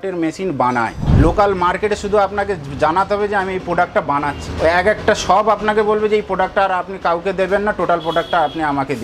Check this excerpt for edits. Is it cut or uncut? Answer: cut